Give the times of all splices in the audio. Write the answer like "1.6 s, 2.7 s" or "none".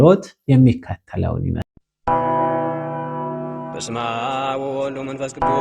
1.6 s